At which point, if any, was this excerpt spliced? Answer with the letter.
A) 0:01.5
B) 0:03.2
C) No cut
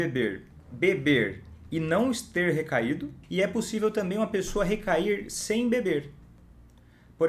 B